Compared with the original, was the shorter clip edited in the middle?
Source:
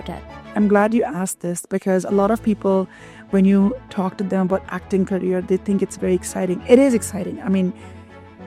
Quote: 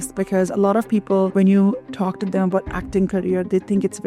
yes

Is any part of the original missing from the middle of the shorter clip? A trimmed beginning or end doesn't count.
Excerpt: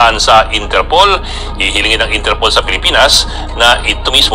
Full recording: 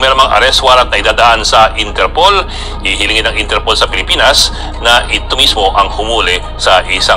no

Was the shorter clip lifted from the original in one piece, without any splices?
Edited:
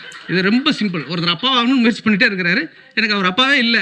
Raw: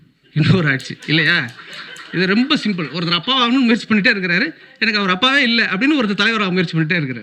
yes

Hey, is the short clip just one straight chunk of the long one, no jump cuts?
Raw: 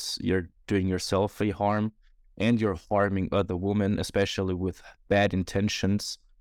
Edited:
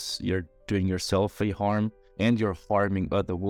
no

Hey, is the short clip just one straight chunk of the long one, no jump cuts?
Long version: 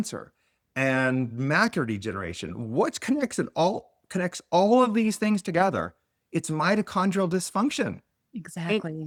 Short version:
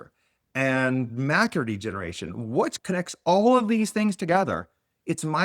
no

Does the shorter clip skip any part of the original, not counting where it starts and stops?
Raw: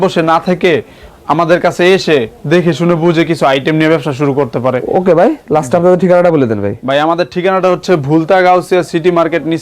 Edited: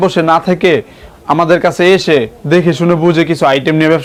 no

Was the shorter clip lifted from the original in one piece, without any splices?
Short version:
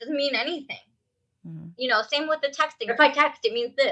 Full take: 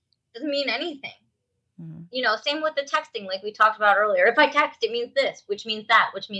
no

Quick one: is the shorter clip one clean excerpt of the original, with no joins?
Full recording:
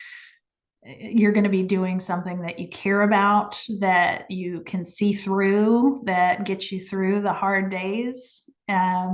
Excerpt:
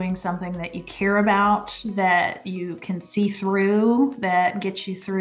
yes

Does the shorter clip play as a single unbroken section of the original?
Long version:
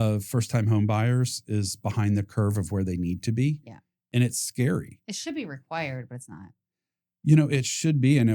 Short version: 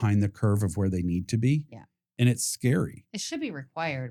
yes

